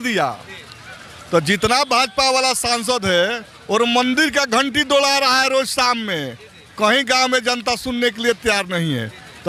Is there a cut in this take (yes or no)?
no